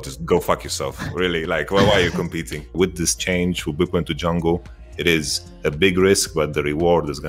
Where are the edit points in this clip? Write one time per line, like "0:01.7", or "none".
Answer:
none